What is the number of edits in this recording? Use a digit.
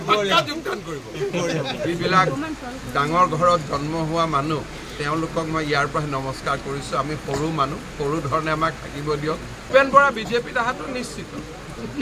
2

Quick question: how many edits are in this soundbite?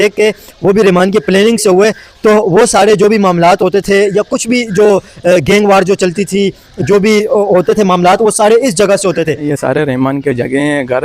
1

